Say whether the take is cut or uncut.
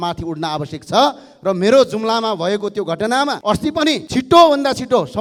uncut